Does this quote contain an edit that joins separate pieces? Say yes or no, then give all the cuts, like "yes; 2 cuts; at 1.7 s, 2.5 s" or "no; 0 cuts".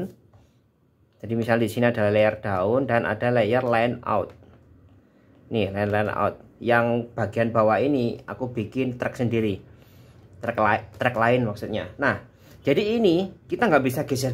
no; 0 cuts